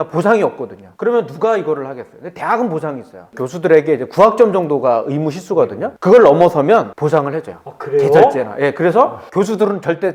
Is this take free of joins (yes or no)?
yes